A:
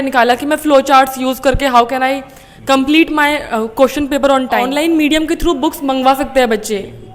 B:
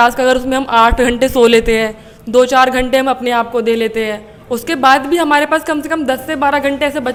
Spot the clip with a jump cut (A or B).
A